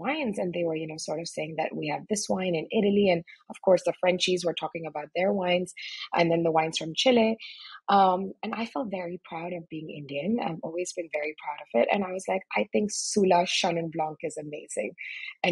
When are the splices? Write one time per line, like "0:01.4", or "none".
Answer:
none